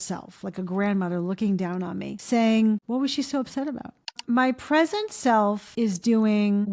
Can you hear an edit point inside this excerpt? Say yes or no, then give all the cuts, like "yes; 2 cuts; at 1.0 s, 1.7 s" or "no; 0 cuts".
yes; 4 cuts; at 2.1 s, 2.8 s, 4.2 s, 5.7 s